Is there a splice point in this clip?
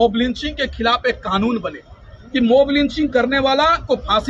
no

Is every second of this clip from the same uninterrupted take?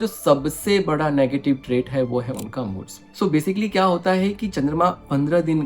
yes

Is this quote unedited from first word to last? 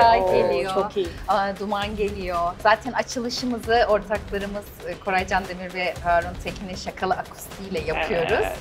yes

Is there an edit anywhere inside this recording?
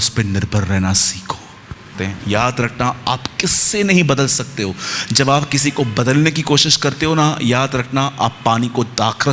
yes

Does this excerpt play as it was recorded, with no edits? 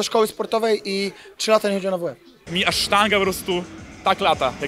no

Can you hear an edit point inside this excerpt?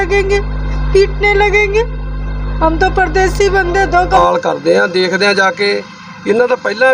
yes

